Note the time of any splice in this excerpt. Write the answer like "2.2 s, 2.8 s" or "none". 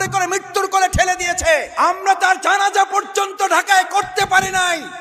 1.7 s